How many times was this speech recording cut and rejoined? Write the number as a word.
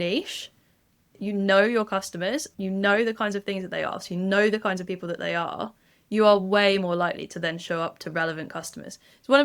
one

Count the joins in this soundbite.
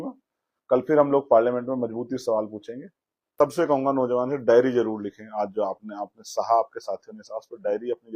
one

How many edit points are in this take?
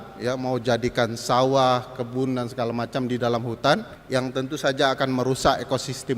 one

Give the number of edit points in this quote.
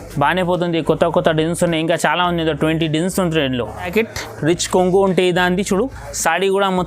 one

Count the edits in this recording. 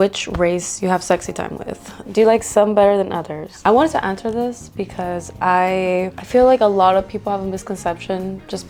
zero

